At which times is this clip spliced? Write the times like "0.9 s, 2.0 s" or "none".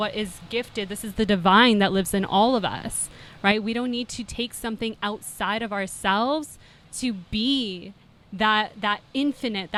none

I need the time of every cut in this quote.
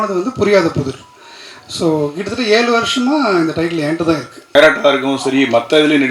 4.4 s

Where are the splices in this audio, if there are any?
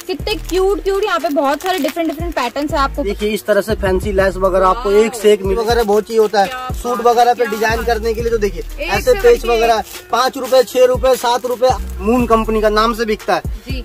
3.0 s, 5.5 s, 11.8 s

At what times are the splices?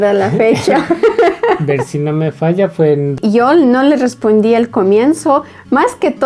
3.1 s

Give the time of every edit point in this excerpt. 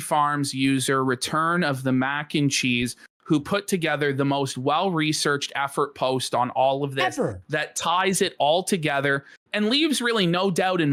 none

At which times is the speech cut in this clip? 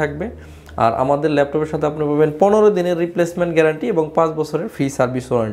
none

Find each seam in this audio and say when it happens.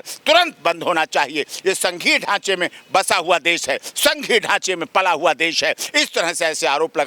none

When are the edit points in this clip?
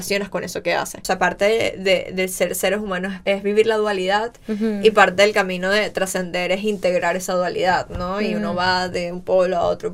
1.0 s, 3.2 s

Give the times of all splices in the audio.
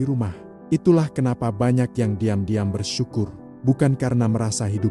none

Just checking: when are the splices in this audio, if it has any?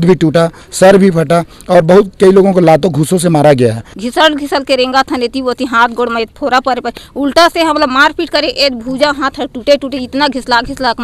3.9 s

